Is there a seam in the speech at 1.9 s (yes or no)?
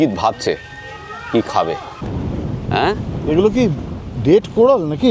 yes